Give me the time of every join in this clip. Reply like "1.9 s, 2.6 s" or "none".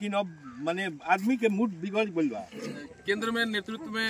2.9 s